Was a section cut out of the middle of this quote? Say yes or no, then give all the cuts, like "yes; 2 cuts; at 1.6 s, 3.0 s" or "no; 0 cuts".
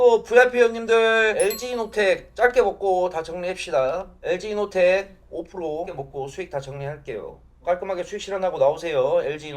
yes; 1 cut; at 1.4 s